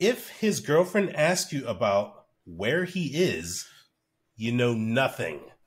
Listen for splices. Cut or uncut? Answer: uncut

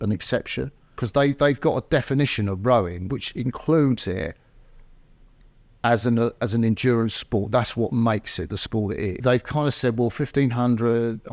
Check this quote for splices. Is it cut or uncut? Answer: cut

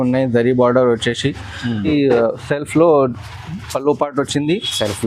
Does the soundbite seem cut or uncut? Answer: cut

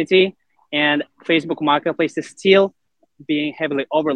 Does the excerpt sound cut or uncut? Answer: uncut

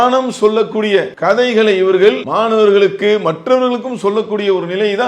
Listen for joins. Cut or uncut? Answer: cut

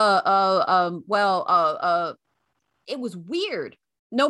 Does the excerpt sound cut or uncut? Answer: uncut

